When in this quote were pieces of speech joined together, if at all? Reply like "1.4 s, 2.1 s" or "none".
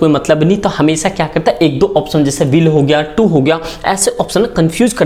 none